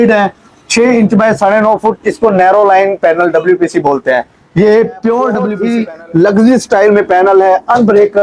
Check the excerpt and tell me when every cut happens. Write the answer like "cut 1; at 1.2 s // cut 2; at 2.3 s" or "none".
cut 1; at 5.6 s

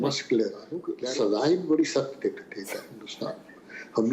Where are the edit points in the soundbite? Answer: cut 1; at 0.9 s

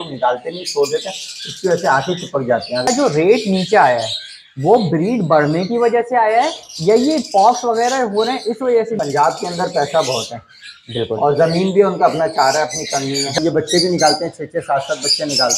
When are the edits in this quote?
cut 1; at 2.9 s // cut 2; at 9.0 s // cut 3; at 13.4 s

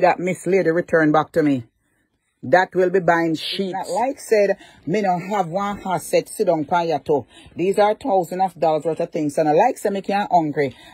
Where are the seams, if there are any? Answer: cut 1; at 3.8 s

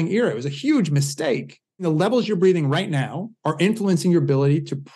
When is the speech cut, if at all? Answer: cut 1; at 1.8 s

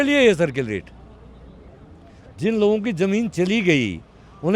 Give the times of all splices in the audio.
none

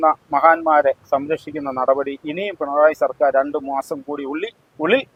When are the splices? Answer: none

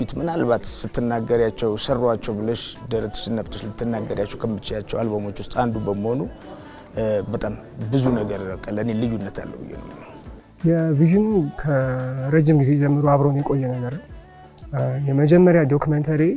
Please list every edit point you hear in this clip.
none

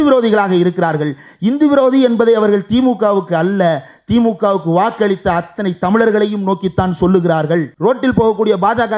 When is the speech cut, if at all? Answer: cut 1; at 7.7 s

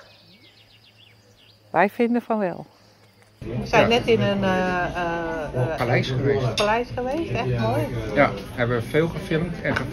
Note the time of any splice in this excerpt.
cut 1; at 3.5 s

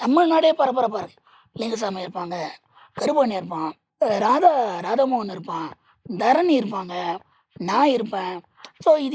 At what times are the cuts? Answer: cut 1; at 3.8 s

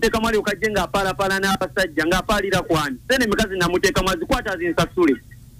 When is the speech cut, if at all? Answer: none

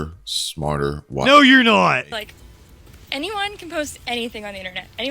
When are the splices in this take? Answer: cut 1; at 2.1 s

